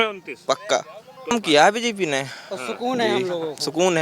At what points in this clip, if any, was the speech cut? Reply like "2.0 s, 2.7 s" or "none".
1.4 s